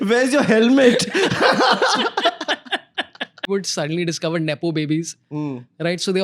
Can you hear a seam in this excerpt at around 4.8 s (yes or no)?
no